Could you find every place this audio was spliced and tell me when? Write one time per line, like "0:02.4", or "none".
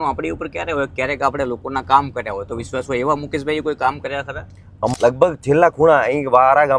0:04.9